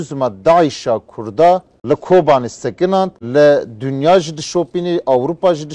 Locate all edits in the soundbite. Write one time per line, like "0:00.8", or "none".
0:01.7
0:03.2